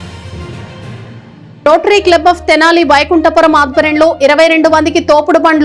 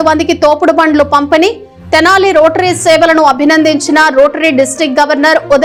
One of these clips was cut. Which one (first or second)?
first